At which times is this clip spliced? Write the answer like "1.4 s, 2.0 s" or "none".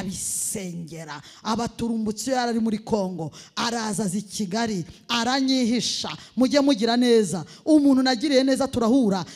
none